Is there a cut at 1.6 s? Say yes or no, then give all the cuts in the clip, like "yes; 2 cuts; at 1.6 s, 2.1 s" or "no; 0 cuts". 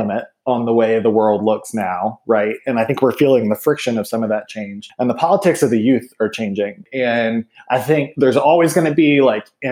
no; 2 cuts; at 4.8 s, 6.8 s